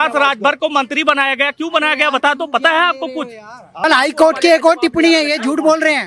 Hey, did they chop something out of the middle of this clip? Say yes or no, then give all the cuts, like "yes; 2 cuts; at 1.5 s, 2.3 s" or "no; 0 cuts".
yes; 1 cut; at 3.8 s